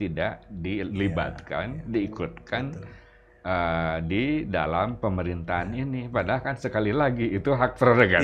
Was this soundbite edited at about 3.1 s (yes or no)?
no